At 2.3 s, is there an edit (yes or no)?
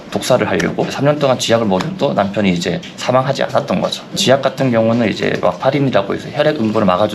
no